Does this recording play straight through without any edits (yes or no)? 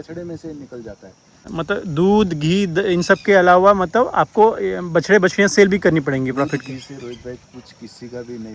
no